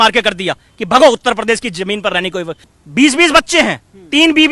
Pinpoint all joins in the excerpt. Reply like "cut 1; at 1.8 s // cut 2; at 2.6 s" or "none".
cut 1; at 2.6 s